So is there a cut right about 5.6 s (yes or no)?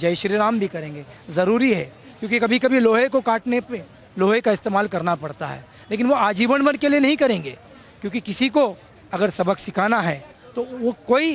no